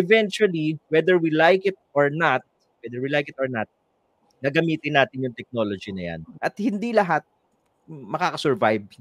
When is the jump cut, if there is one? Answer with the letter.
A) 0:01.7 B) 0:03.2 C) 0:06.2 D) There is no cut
C